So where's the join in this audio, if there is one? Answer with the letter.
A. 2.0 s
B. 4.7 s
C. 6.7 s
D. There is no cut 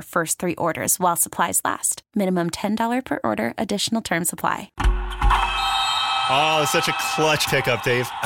B